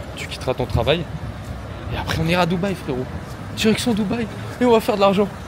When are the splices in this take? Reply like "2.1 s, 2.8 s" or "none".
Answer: none